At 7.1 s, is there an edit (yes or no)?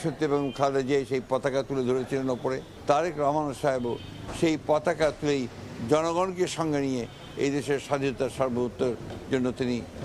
no